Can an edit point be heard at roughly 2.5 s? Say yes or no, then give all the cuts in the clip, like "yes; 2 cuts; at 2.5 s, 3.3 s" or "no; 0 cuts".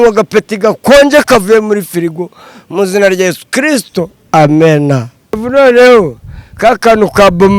no; 1 cut; at 5.4 s